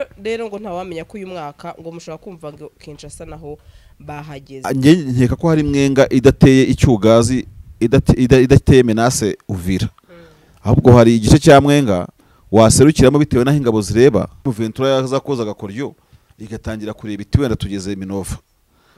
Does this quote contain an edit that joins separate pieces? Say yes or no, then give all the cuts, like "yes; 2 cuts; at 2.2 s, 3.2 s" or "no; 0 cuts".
yes; 2 cuts; at 4.6 s, 14.4 s